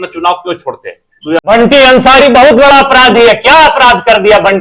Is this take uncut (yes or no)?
no